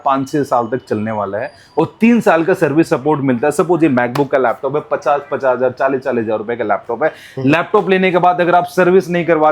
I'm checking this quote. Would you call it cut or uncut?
uncut